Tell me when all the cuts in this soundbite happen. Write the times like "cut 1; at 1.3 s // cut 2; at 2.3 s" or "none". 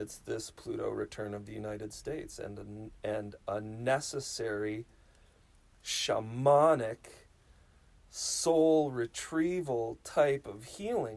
none